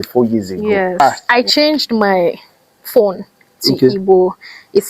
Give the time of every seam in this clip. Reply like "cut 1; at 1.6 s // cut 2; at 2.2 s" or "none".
cut 1; at 1.2 s